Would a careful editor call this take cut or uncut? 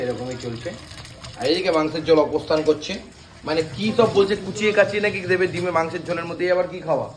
uncut